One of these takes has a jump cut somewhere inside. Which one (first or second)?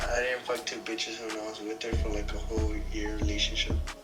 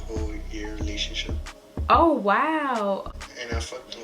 second